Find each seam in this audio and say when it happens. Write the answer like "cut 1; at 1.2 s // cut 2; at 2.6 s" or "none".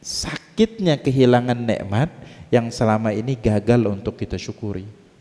none